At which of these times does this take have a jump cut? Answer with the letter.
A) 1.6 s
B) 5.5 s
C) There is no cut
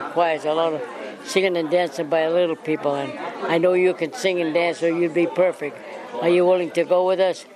C